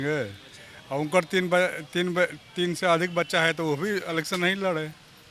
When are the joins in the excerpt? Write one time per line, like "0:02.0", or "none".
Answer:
none